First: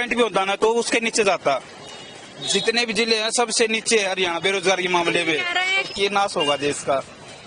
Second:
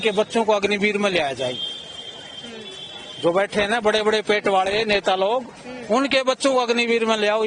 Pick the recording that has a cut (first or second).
first